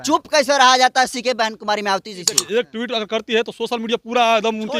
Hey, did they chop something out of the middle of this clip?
yes; 1 cut; at 2.4 s

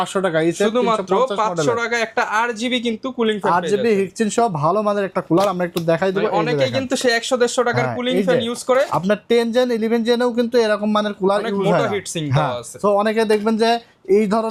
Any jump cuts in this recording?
no; 0 cuts

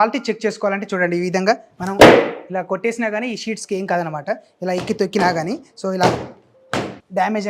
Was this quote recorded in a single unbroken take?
yes; 0 cuts

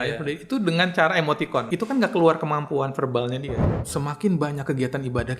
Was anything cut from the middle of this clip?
yes; 2 cuts; at 1.7 s, 3.6 s

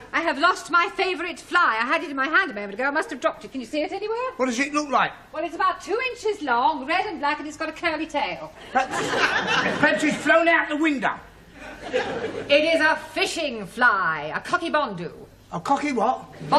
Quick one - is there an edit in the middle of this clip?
no; 0 cuts

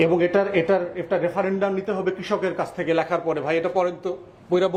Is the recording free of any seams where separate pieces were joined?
yes; 0 cuts

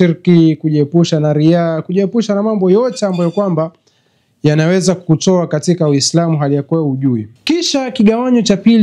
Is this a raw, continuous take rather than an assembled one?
no; 1 cut; at 7.3 s

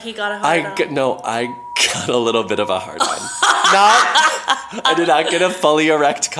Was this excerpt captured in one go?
yes; 0 cuts

